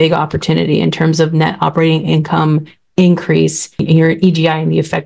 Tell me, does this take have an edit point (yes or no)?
yes